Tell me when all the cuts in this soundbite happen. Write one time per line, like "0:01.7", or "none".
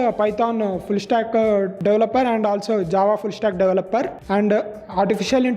0:01.7
0:04.2